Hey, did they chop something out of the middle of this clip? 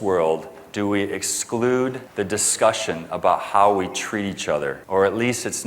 yes; 2 cuts; at 2.0 s, 4.8 s

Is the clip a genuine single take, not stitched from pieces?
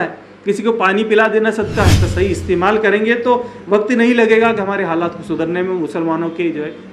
no; 1 cut; at 2.0 s

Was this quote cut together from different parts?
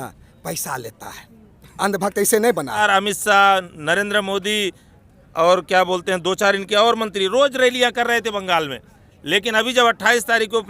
yes; 1 cut; at 2.8 s

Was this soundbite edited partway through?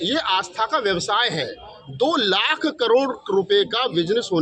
no; 0 cuts

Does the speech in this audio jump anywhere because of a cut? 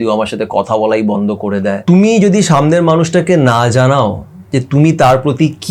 yes; 1 cut; at 1.8 s

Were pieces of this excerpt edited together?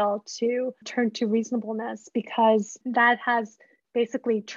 yes; 1 cut; at 2.8 s

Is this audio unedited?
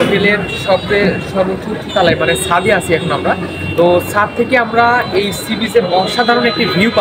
yes; 0 cuts

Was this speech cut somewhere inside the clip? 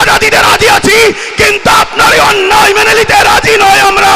no; 0 cuts

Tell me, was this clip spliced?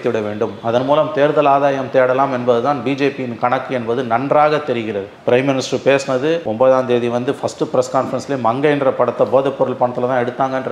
no; 0 cuts

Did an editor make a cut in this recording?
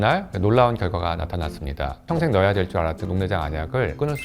yes; 2 cuts; at 2.1 s, 3.0 s

